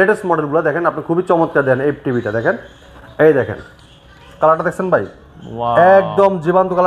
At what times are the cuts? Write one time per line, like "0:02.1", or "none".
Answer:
none